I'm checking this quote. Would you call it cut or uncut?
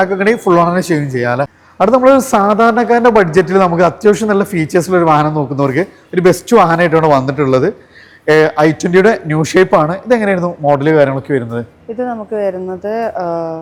uncut